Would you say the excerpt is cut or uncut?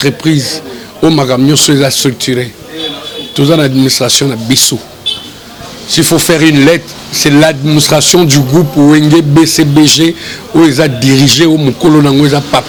uncut